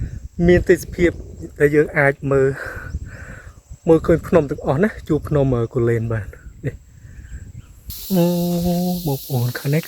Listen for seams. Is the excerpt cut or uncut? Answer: cut